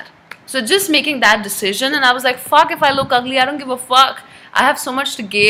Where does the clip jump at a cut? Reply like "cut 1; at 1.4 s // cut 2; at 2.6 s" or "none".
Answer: none